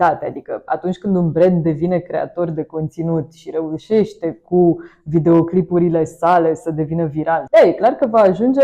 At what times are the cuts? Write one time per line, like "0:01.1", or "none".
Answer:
0:07.4